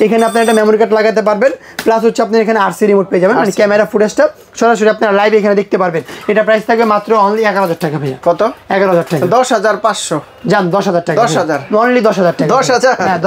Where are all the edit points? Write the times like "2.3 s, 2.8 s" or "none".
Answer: none